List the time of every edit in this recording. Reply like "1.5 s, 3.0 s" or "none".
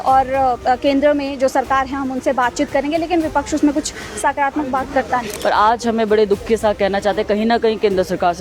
5.3 s